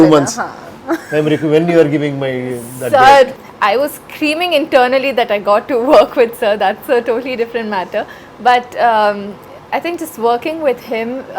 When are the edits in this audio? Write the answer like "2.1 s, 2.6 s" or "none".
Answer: 3.4 s